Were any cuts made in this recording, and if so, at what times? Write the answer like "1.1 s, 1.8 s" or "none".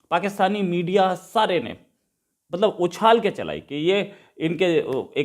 none